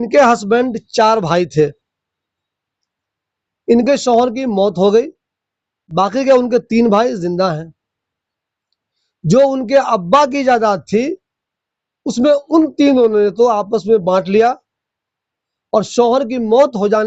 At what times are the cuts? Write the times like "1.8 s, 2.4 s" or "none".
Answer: none